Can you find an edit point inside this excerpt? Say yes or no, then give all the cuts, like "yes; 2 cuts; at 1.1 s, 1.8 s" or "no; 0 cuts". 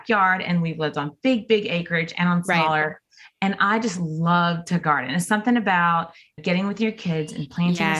no; 0 cuts